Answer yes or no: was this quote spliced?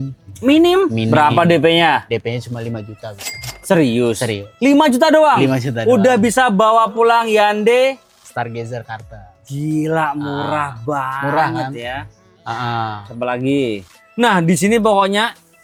no